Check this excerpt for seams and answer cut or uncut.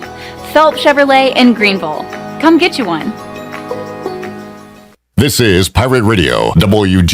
cut